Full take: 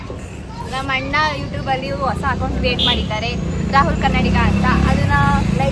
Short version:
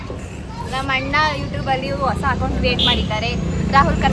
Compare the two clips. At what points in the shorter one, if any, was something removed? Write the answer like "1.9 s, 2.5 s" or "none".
none